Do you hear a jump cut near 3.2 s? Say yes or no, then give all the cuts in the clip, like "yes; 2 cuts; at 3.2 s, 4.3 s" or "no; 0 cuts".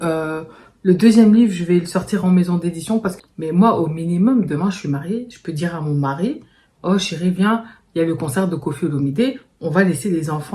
yes; 1 cut; at 3.2 s